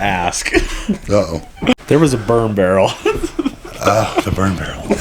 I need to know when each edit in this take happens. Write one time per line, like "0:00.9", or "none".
0:01.7